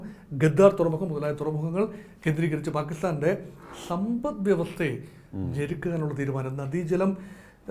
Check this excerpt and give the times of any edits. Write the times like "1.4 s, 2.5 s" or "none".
none